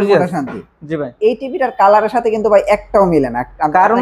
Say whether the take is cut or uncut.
cut